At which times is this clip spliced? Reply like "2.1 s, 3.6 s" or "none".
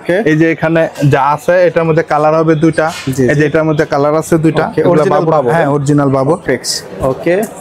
6.4 s

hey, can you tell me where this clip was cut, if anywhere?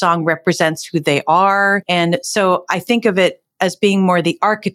1.8 s

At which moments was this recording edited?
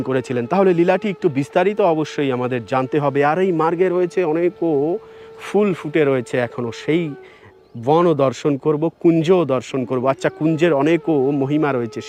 none

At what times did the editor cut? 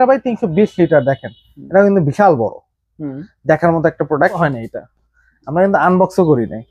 4.4 s

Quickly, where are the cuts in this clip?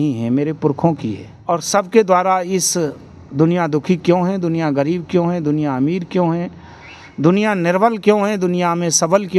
1.3 s

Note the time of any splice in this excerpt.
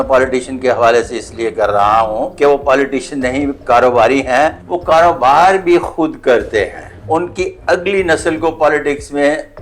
2.3 s, 4.7 s, 6.9 s

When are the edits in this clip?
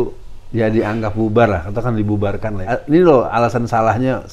2.7 s

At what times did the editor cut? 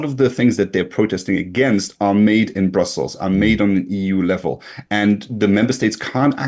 none

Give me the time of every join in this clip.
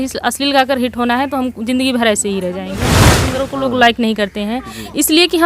3.0 s

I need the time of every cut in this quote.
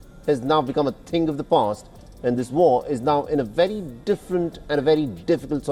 none

